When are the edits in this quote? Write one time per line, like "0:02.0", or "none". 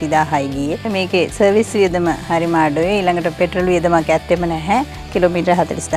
0:00.8
0:05.0